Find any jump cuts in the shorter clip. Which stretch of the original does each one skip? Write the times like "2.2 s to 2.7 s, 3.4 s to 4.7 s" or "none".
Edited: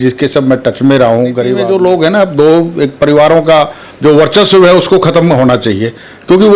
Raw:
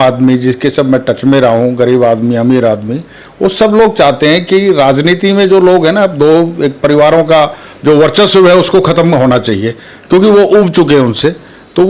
2.0 s to 5.4 s